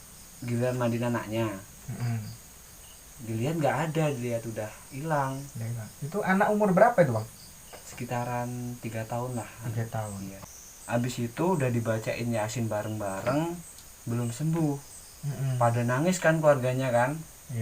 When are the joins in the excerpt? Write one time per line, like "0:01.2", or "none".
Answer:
0:10.4